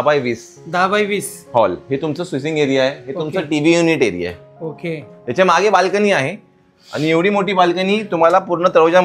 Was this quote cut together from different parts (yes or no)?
no